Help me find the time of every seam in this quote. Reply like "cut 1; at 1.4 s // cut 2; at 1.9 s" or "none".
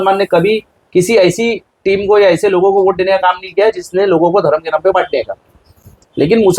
none